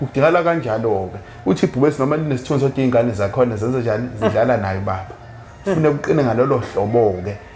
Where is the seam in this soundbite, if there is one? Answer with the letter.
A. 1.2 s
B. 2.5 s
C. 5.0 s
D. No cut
D